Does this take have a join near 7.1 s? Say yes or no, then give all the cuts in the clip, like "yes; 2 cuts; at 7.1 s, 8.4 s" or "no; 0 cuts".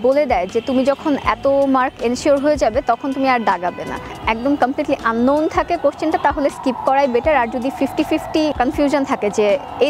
no; 2 cuts; at 4.1 s, 8.5 s